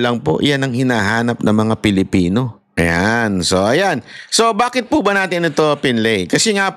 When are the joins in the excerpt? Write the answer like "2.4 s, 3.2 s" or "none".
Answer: 2.6 s